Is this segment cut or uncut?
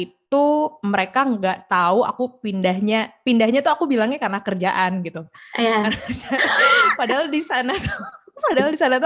uncut